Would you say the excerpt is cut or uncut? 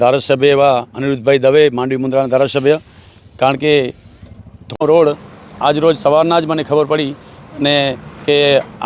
cut